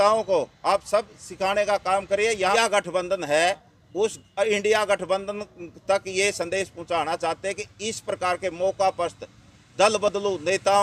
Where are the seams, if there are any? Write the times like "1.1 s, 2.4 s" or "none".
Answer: 2.5 s

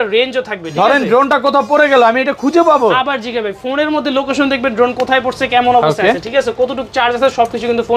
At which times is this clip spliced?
none

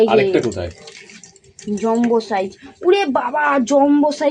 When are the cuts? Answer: none

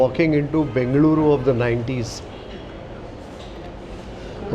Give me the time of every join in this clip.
2.3 s

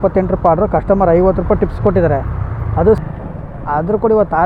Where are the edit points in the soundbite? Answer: 3.0 s

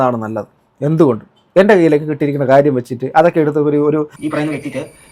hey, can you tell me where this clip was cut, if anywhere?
4.1 s

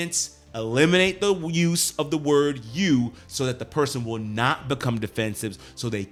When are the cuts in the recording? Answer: none

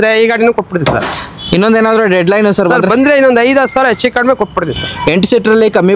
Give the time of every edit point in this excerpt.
none

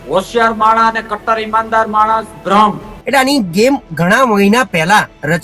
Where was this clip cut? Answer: 3.0 s

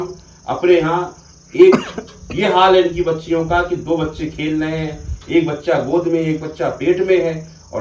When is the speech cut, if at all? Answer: none

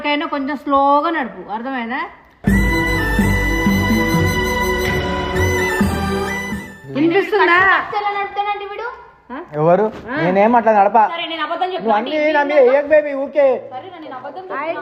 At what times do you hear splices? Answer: none

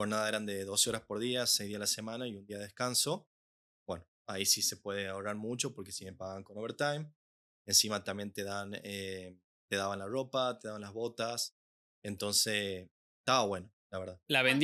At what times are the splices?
none

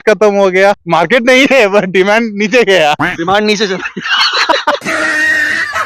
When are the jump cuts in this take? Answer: 0.8 s, 4.8 s

